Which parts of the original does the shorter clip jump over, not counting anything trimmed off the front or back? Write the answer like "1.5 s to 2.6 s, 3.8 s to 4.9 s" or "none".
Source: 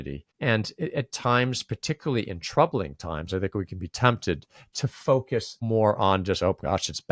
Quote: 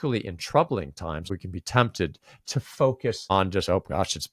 3.3 s to 3.5 s, 5.5 s to 6.0 s